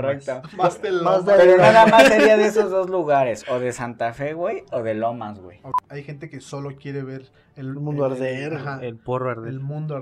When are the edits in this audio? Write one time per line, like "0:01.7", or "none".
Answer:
0:05.7

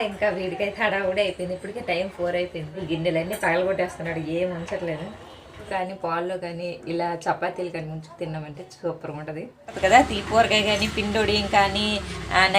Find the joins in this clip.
0:02.8
0:05.7
0:09.7

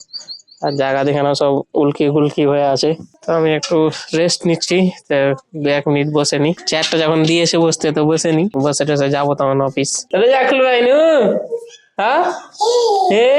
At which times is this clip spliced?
0:03.1
0:10.1

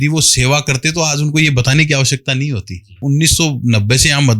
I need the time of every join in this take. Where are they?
0:03.0

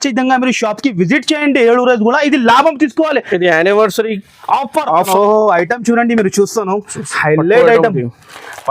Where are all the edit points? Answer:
0:05.1

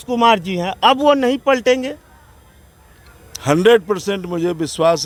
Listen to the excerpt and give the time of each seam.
none

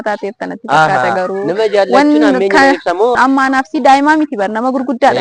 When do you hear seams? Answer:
0:03.1

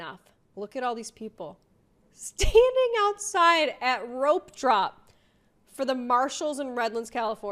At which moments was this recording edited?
none

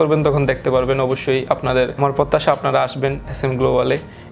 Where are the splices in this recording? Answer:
none

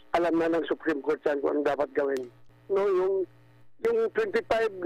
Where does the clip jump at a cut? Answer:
0:02.6

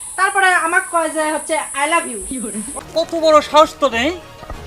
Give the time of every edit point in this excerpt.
0:02.7

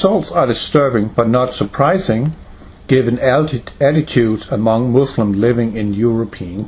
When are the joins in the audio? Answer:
0:03.6

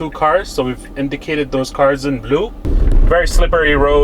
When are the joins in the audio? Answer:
0:02.7

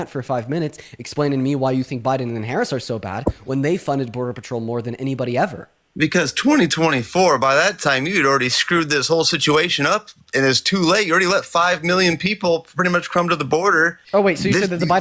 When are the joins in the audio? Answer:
0:14.0

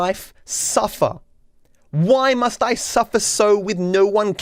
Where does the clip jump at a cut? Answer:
none

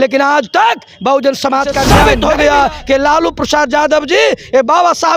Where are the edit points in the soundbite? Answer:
0:01.9

